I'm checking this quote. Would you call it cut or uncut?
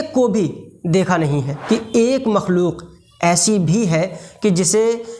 cut